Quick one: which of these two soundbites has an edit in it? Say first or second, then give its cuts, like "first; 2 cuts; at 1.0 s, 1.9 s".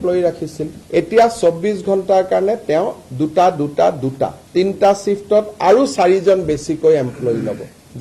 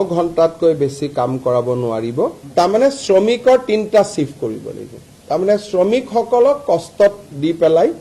second; 1 cut; at 2.4 s